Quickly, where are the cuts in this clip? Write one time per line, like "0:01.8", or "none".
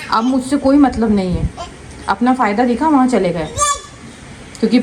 none